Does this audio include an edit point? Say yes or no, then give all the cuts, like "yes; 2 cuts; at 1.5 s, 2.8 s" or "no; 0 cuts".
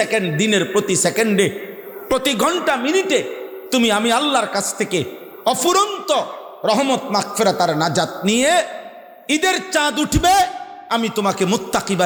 no; 0 cuts